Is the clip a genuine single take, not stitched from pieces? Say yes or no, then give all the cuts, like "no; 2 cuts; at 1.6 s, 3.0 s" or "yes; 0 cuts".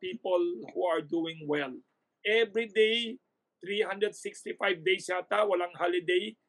no; 1 cut; at 2.1 s